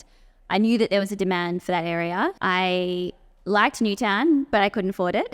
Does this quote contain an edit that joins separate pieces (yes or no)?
yes